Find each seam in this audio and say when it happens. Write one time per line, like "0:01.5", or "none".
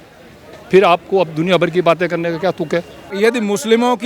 0:03.0